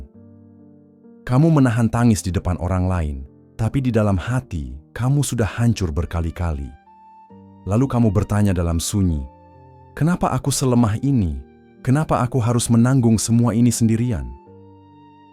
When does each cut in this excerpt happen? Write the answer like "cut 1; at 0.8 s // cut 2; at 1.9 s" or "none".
cut 1; at 14.3 s

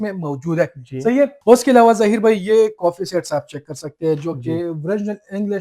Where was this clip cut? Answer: cut 1; at 1.4 s

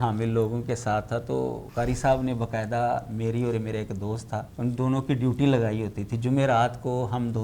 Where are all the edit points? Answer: cut 1; at 1.6 s // cut 2; at 4.5 s

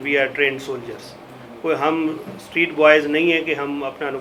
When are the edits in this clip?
none

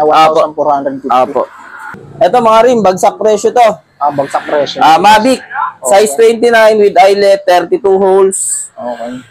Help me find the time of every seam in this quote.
cut 1; at 1.9 s

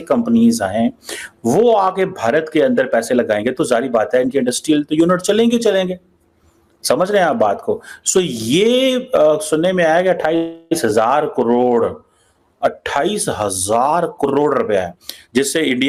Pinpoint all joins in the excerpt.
none

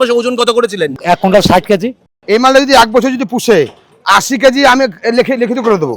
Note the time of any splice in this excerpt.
cut 1; at 1.0 s // cut 2; at 2.2 s

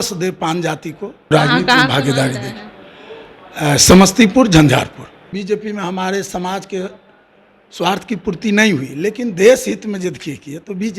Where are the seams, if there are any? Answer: cut 1; at 1.3 s // cut 2; at 5.3 s

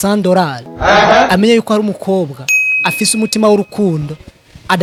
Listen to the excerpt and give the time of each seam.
none

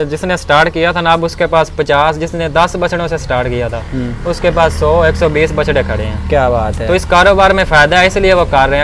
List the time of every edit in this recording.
none

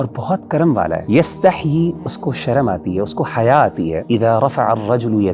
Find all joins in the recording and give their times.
cut 1; at 1.0 s // cut 2; at 4.0 s

